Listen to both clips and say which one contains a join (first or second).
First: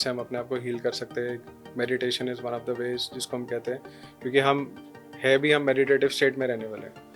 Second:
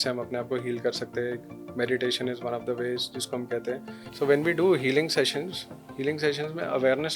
second